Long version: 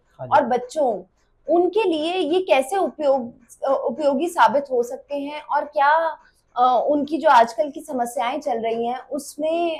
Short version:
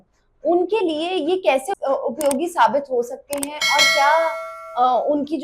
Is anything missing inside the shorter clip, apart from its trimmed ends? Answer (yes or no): yes